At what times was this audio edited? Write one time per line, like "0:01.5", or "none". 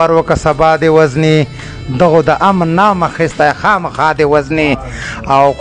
none